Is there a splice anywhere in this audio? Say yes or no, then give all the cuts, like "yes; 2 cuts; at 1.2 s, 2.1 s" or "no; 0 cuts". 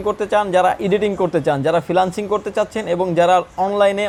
no; 0 cuts